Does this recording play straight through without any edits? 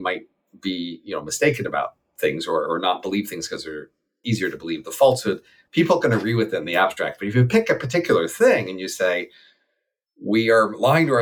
no; 1 cut; at 4.1 s

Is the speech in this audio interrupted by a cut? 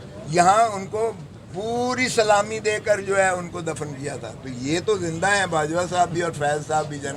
no; 0 cuts

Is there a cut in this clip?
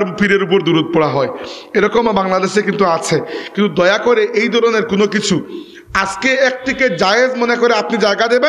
no; 0 cuts

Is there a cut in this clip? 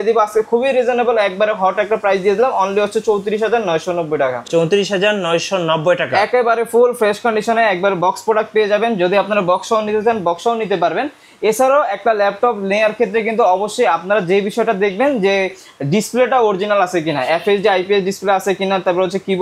no; 0 cuts

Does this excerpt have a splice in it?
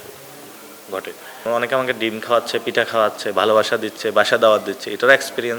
yes; 1 cut; at 1.3 s

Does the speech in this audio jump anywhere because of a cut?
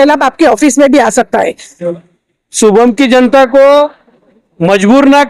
yes; 1 cut; at 1.7 s

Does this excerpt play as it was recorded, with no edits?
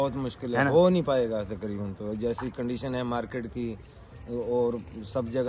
yes; 0 cuts

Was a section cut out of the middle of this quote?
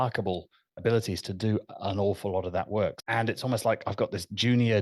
yes; 1 cut; at 3.0 s

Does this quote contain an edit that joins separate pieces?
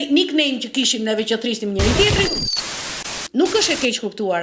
yes; 1 cut; at 2.6 s

